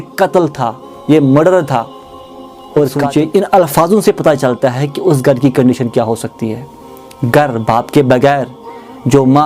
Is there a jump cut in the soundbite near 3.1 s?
yes; 1 cut; at 3.1 s

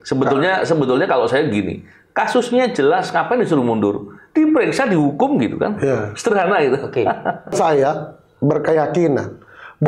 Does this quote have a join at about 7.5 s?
yes; 1 cut; at 7.5 s

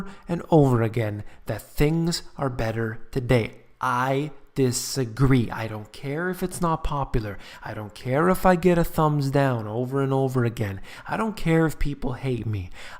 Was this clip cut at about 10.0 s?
yes; 1 cut; at 10.0 s

